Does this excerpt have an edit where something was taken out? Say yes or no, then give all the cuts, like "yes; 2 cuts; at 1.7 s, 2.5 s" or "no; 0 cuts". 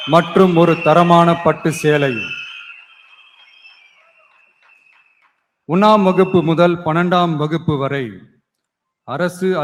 no; 0 cuts